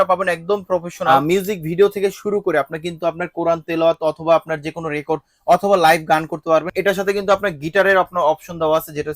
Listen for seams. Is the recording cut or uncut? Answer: cut